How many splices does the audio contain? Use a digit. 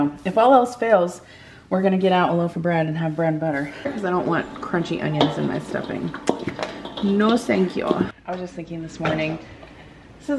2